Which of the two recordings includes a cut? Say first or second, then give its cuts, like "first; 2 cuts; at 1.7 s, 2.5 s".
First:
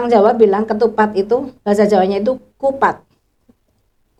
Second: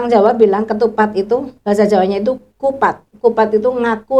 second; 1 cut; at 3.1 s